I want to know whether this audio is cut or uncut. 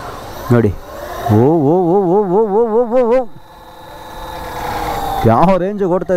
uncut